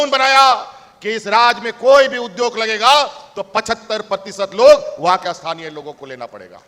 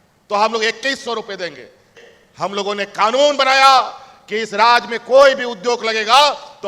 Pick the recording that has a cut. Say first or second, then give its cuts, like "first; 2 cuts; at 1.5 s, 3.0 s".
second; 1 cut; at 1.9 s